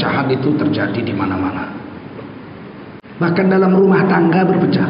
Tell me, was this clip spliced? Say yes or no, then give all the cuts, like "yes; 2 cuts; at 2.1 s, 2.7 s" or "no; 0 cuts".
no; 0 cuts